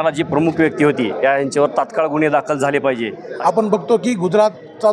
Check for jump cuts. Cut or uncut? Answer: cut